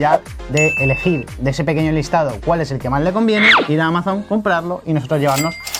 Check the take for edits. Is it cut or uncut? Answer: uncut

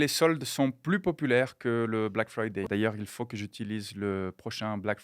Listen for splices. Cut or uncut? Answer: cut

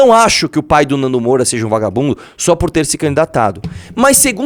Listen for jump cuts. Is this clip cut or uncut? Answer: uncut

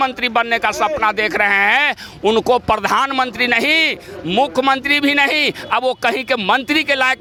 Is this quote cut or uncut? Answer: uncut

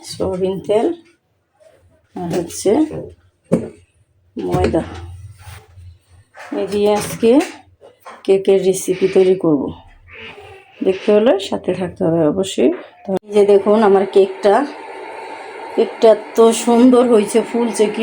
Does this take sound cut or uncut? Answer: cut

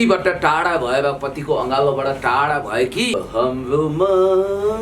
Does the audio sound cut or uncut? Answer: cut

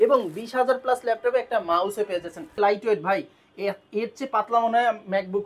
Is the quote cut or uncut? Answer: cut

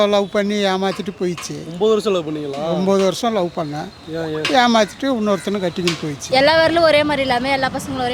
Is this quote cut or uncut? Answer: cut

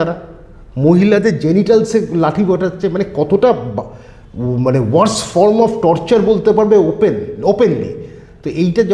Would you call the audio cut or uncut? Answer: uncut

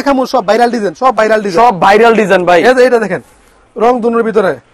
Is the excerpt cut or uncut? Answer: uncut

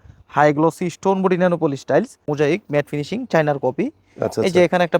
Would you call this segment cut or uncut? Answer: cut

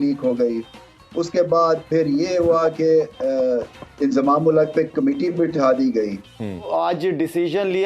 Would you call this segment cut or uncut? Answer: cut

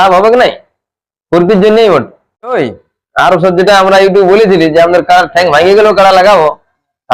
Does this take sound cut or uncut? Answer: cut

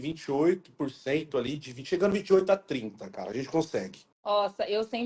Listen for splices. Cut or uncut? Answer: cut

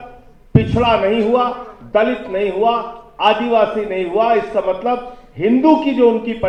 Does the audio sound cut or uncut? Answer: uncut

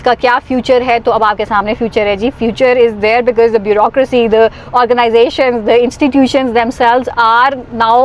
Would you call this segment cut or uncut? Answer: uncut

